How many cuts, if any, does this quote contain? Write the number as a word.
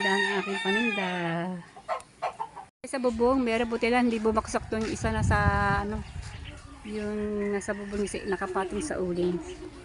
one